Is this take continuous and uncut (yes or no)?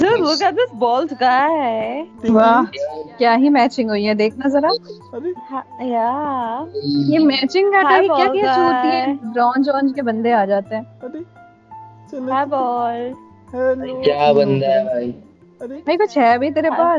no